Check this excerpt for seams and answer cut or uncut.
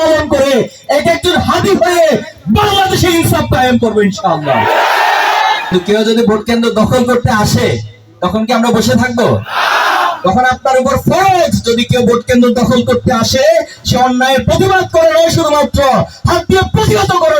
cut